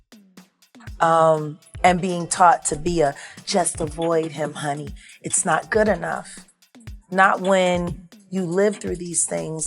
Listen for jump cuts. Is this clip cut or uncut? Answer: cut